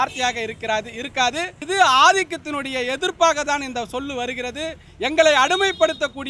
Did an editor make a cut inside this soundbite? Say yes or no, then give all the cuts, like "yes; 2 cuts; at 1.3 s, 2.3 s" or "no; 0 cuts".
yes; 1 cut; at 1.6 s